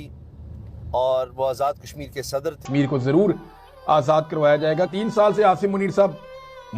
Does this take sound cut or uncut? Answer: cut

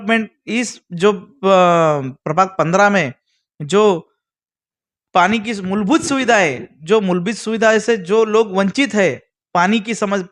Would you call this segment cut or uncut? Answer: uncut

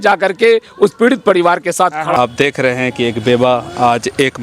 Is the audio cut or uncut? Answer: cut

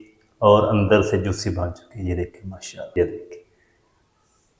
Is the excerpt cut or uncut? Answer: cut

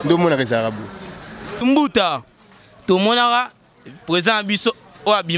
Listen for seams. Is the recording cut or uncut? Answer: cut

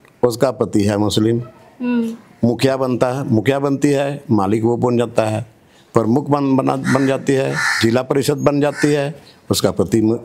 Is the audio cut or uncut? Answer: uncut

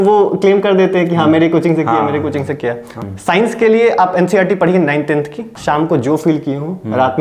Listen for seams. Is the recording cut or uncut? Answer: cut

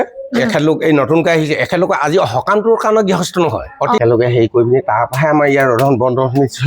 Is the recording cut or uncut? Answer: cut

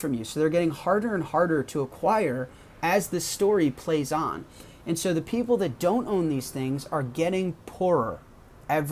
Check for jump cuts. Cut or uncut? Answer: uncut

